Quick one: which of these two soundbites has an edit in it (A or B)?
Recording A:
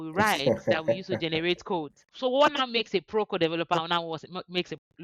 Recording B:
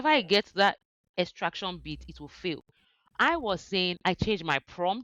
A